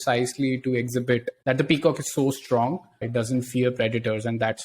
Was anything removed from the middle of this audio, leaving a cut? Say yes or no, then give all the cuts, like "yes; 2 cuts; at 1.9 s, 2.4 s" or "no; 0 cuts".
yes; 2 cuts; at 1.3 s, 2.9 s